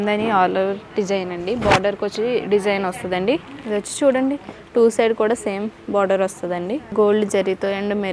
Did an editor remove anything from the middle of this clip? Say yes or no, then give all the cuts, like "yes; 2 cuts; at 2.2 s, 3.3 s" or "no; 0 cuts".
yes; 2 cuts; at 3.5 s, 6.9 s